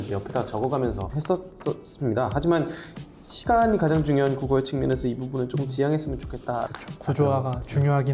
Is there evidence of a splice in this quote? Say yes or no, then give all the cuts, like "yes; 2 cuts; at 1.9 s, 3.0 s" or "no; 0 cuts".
yes; 2 cuts; at 1.1 s, 6.8 s